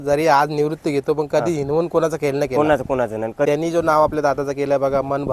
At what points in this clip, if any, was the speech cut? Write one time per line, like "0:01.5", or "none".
0:03.5